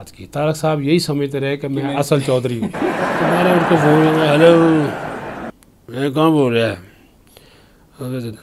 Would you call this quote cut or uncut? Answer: cut